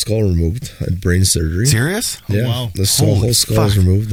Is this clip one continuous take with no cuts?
yes; 0 cuts

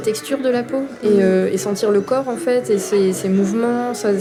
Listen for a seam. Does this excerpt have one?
no; 0 cuts

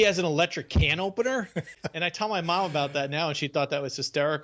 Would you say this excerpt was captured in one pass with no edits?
no; 1 cut; at 1.6 s

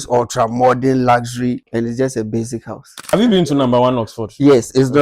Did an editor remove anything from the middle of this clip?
yes; 2 cuts; at 1.6 s, 3.0 s

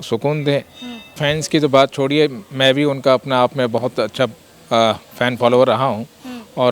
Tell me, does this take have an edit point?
yes; 1 cut; at 1.1 s

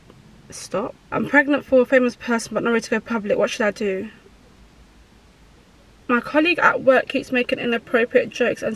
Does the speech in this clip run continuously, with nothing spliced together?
no; 2 cuts; at 1.0 s, 6.0 s

